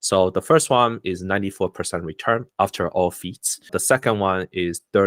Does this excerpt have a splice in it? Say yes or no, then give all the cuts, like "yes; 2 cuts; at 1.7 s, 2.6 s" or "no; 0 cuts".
yes; 1 cut; at 3.7 s